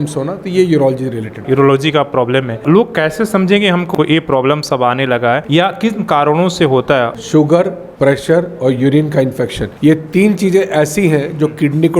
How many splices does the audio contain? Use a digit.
6